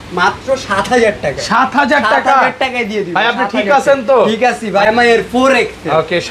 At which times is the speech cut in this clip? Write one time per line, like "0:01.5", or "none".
0:04.9